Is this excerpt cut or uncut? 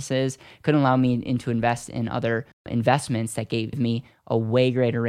cut